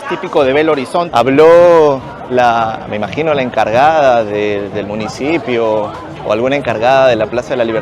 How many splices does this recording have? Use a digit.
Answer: 1